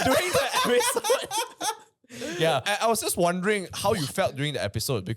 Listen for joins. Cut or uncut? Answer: cut